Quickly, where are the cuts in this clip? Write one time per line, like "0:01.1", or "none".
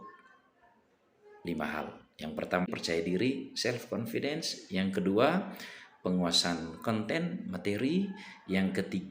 0:02.7